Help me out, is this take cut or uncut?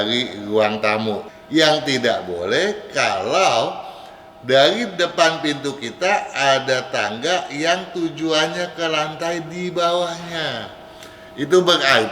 cut